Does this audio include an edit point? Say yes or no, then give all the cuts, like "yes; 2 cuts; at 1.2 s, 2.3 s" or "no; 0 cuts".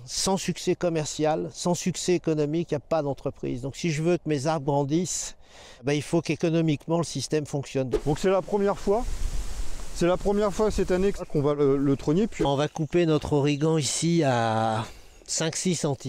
yes; 2 cuts; at 7.9 s, 12.4 s